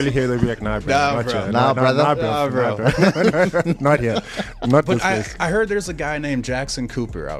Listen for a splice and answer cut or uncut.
uncut